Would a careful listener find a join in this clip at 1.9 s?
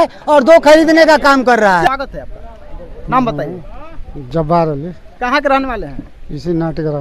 yes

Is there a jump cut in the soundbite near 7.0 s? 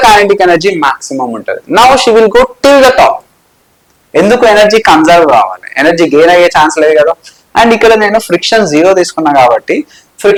no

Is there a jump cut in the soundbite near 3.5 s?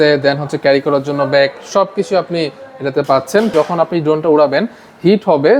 yes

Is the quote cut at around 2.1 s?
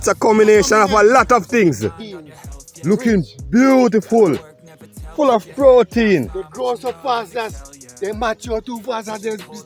yes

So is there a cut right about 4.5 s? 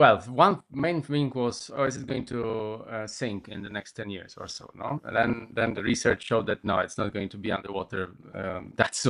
no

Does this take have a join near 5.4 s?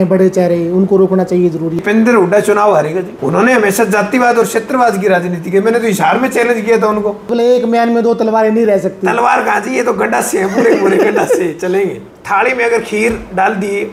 no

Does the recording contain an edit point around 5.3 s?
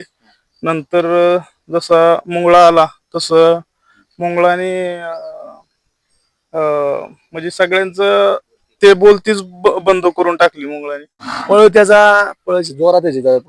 no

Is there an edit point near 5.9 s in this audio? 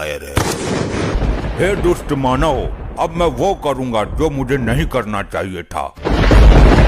yes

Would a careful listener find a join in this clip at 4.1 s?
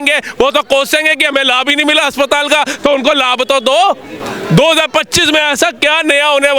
no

